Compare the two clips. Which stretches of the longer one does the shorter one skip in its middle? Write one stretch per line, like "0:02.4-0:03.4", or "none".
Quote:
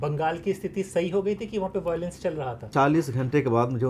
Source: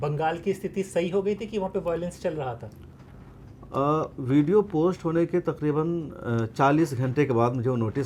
0:02.7-0:06.5

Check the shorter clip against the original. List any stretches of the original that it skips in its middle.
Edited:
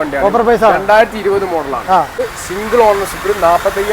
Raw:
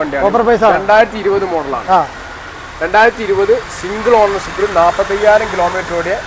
0:02.4-0:03.7

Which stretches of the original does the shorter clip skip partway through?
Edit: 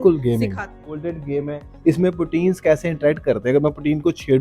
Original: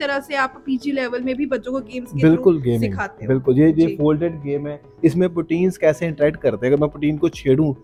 0:03.3-0:04.1

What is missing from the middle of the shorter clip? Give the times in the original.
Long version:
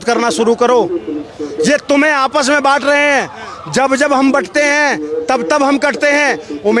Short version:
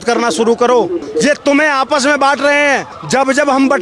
0:01.0-0:01.4
0:03.4-0:03.6

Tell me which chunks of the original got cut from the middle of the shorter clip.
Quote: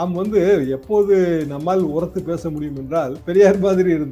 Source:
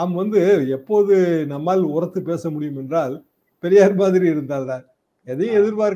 0:03.2-0:03.5

